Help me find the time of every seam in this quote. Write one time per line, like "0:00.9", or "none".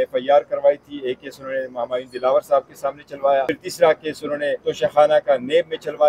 0:03.6
0:04.6